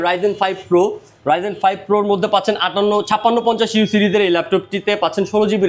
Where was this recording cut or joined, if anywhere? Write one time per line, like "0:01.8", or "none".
none